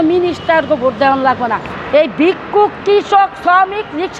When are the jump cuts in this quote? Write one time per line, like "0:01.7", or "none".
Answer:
none

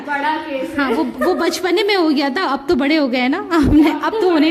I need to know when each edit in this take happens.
none

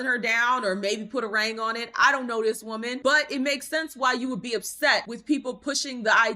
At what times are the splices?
0:03.0

